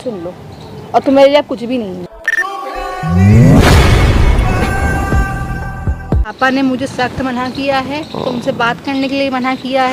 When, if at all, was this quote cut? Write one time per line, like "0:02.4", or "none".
0:02.3
0:06.2